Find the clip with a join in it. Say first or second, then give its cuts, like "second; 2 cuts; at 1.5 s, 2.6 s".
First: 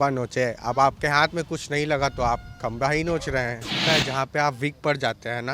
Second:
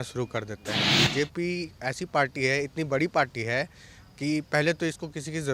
first; 1 cut; at 3.8 s